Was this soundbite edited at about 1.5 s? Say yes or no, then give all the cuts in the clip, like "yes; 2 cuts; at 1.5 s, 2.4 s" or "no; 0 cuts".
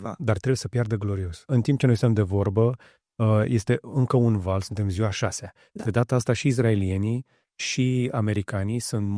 yes; 1 cut; at 1.5 s